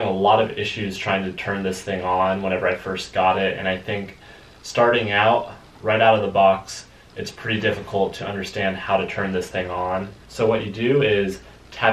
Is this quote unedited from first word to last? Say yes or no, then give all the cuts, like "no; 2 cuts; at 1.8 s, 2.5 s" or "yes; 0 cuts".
no; 1 cut; at 10.2 s